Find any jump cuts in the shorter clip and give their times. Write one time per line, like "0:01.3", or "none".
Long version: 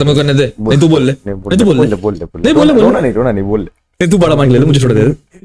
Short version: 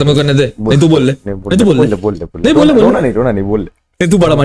none